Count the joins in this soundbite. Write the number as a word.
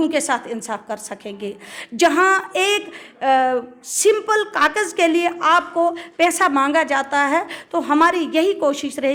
zero